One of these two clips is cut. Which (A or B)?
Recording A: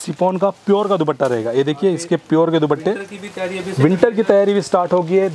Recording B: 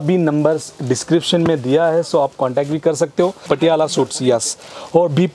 B